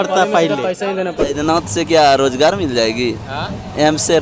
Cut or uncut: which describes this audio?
cut